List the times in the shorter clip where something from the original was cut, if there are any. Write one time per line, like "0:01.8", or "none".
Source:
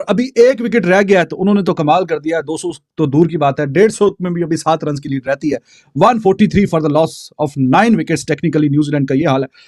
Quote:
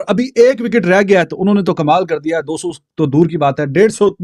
none